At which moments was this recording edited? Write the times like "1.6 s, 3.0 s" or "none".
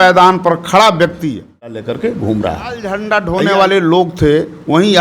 1.7 s, 3.0 s